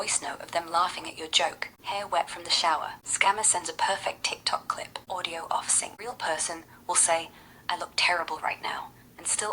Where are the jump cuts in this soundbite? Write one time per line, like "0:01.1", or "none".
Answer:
0:01.7
0:03.0
0:04.9
0:05.9